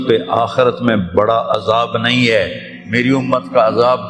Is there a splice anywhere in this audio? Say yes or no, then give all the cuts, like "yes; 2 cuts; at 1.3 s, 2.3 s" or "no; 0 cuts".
no; 0 cuts